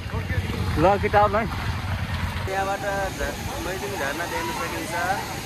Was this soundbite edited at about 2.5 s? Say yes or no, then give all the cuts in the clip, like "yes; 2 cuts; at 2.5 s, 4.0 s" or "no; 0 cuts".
yes; 1 cut; at 2.5 s